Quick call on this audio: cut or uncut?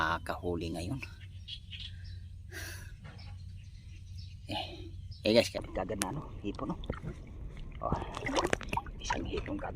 cut